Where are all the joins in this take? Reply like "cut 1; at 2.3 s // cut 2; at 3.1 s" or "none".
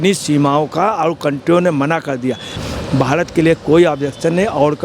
cut 1; at 2.6 s